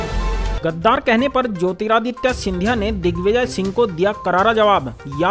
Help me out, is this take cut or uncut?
uncut